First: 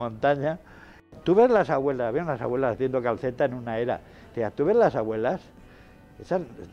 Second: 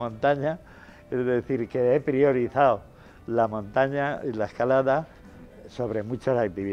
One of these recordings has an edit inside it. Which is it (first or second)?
first